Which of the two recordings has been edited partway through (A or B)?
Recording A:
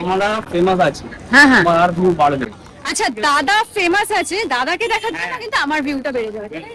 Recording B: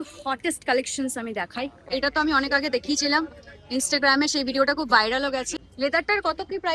B